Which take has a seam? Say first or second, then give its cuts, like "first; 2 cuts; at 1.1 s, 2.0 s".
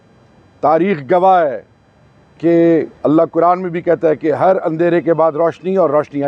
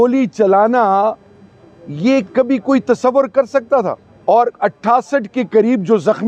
second; 1 cut; at 4.0 s